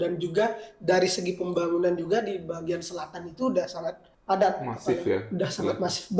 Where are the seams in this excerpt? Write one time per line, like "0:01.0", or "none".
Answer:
0:04.1